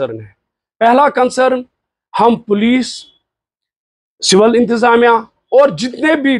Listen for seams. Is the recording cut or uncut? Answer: uncut